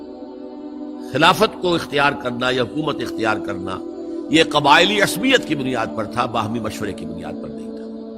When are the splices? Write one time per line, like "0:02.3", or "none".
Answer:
0:07.1